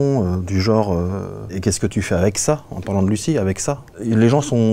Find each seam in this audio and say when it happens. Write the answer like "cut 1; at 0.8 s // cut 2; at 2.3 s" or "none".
cut 1; at 1.5 s // cut 2; at 3.9 s